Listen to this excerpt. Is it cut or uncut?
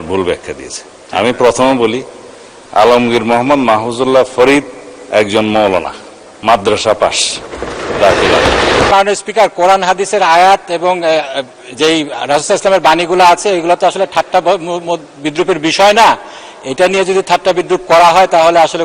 cut